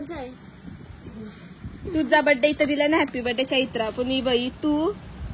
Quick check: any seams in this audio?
no; 0 cuts

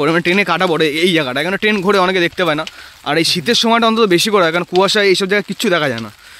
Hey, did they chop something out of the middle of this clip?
no; 0 cuts

